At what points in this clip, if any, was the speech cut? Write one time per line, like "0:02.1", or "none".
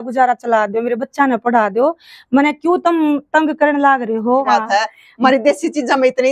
0:04.5